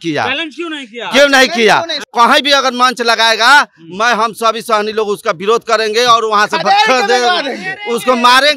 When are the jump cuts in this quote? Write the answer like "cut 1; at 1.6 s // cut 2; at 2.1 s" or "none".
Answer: cut 1; at 2.0 s